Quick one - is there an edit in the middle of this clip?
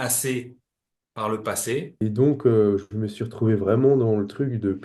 yes; 1 cut; at 1.9 s

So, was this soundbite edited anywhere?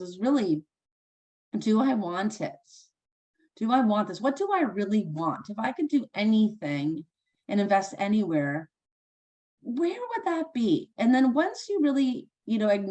no; 0 cuts

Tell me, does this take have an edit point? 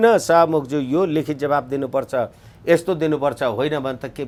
no; 0 cuts

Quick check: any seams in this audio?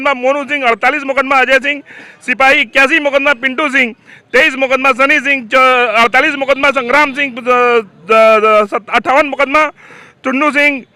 no; 0 cuts

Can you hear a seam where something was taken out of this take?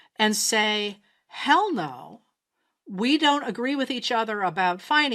no; 0 cuts

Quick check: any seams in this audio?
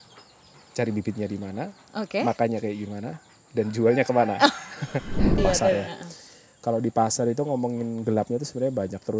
yes; 1 cut; at 5.3 s

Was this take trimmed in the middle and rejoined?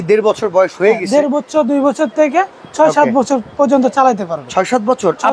no; 0 cuts

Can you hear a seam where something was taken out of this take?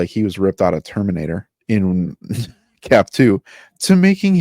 yes; 1 cut; at 1.5 s

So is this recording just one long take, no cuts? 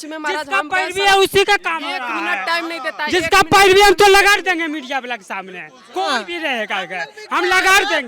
yes; 0 cuts

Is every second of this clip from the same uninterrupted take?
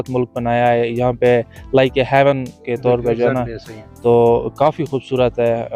yes; 0 cuts

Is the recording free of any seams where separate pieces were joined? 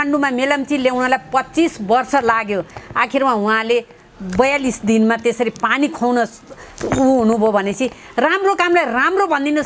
yes; 0 cuts

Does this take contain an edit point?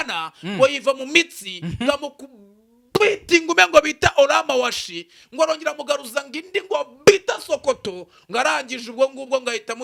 no; 0 cuts

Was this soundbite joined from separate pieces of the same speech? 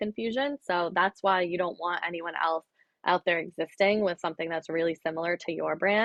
no; 0 cuts

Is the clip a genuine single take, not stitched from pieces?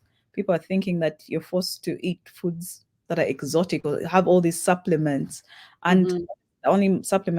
yes; 0 cuts

